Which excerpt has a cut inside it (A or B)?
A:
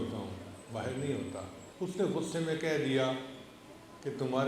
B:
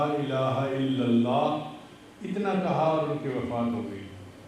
A